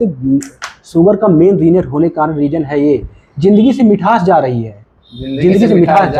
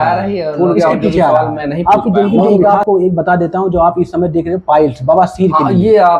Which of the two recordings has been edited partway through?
second; 1 cut; at 2.5 s

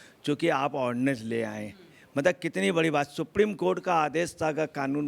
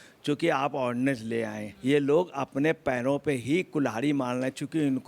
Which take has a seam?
second; 1 cut; at 1.7 s

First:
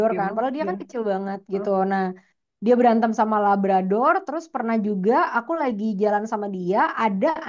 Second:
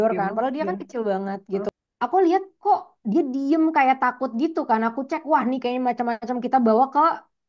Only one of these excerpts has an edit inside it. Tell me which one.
second; 1 cut; at 1.7 s

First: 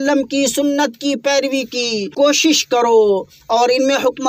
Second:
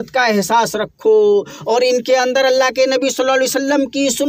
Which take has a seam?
first; 1 cut; at 2.1 s

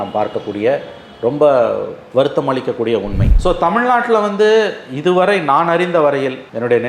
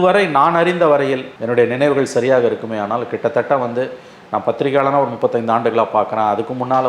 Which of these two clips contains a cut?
first; 1 cut; at 3.2 s

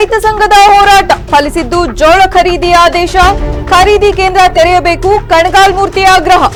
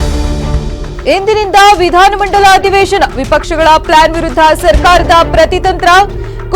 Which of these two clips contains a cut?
second; 1 cut; at 1.0 s

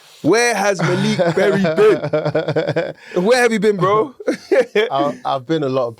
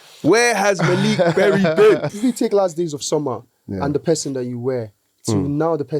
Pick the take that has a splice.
second; 1 cut; at 2.1 s

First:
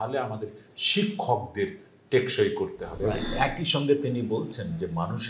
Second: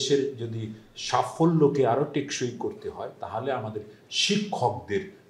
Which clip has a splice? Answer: first; 1 cut; at 3.2 s

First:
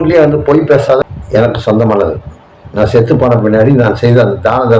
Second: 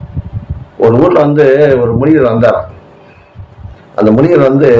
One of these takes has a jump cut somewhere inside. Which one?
first; 1 cut; at 1.0 s

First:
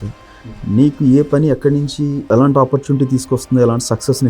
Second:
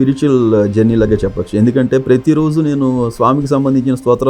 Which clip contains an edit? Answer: first; 1 cut; at 2.3 s

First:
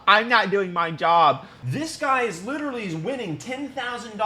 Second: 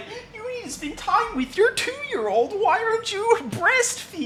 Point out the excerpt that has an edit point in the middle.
first; 1 cut; at 1.5 s

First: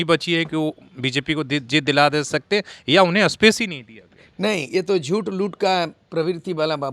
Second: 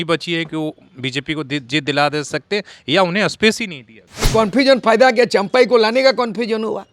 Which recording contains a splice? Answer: second; 1 cut; at 4.3 s

